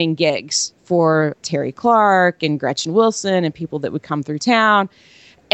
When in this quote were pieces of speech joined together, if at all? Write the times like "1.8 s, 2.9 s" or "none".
1.4 s